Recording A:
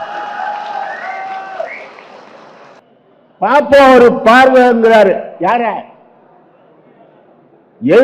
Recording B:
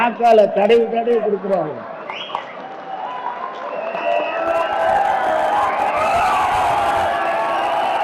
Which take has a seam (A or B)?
A